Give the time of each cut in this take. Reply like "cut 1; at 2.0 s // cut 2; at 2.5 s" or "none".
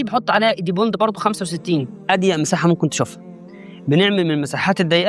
cut 1; at 1.9 s